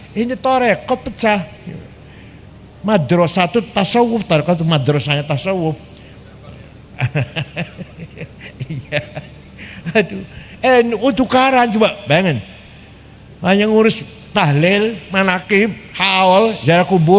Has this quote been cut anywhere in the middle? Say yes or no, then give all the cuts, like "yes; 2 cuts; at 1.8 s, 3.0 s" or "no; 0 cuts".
no; 0 cuts